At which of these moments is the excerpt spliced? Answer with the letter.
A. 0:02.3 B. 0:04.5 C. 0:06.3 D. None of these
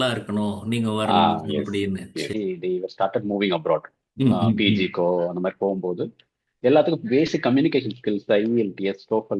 A